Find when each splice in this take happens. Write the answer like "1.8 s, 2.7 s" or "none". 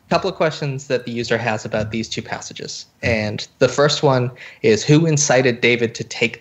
none